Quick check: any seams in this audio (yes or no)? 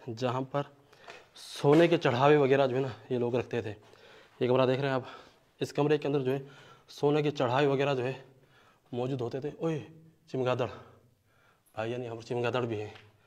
no